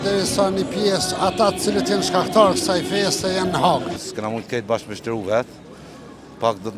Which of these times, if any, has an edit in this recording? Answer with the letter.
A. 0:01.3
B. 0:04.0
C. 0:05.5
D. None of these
B